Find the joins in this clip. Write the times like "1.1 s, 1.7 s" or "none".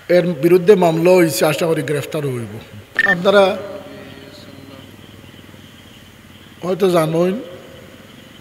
2.9 s